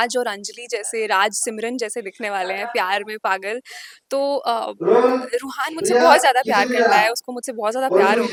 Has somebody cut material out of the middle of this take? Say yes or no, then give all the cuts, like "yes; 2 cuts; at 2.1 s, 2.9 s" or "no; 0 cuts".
no; 0 cuts